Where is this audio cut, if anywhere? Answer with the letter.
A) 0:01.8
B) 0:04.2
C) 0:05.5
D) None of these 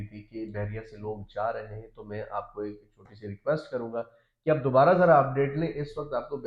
D